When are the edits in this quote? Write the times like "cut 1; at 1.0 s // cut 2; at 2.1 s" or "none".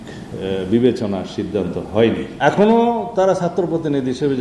cut 1; at 2.3 s